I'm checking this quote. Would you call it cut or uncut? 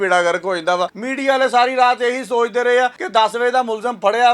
cut